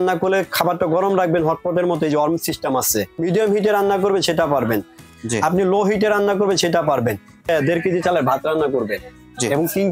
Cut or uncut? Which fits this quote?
cut